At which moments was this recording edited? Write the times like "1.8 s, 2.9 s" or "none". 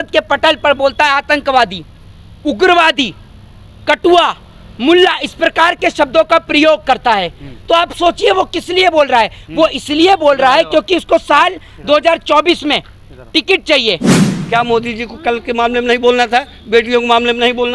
14.3 s